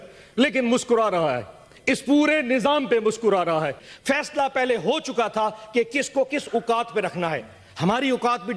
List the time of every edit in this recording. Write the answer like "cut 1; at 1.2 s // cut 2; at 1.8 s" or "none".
cut 1; at 3.9 s